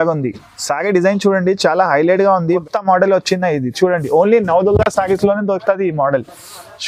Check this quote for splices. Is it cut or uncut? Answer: cut